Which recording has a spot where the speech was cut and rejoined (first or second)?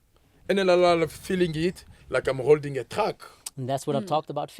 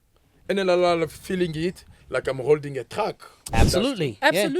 second